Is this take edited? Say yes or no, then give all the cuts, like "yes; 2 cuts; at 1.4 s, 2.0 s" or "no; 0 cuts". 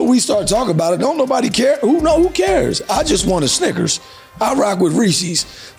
no; 0 cuts